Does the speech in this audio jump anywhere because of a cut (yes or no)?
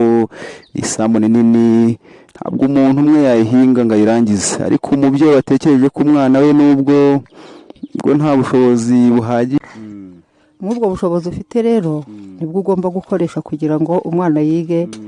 yes